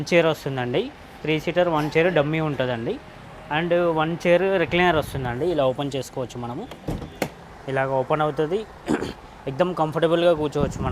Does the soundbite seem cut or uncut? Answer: uncut